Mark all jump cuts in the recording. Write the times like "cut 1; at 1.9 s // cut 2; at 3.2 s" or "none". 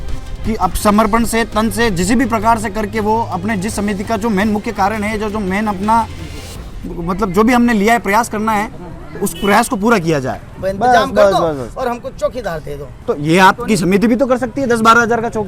cut 1; at 10.4 s // cut 2; at 12.9 s